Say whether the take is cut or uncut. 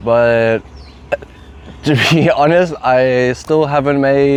uncut